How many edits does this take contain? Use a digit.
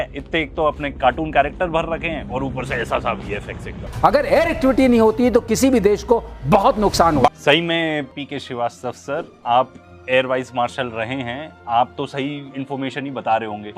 1